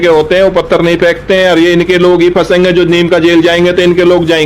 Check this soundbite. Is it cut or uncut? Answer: uncut